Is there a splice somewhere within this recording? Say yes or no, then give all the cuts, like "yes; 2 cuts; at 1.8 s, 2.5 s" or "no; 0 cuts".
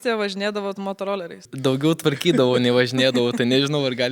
yes; 1 cut; at 1.4 s